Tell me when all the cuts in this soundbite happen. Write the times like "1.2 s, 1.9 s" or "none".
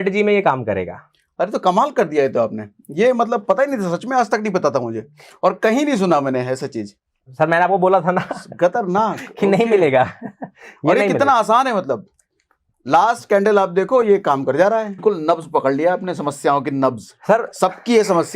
15.0 s